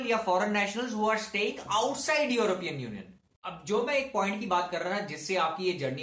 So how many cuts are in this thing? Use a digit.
1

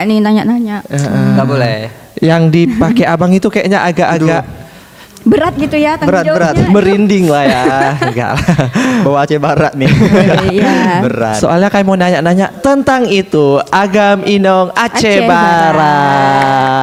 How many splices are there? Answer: 0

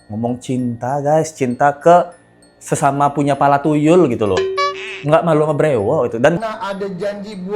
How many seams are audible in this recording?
1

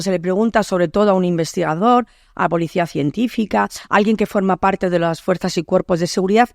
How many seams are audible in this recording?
0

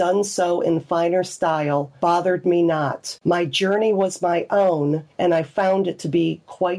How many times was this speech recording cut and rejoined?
3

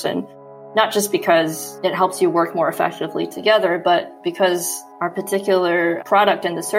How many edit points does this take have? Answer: 1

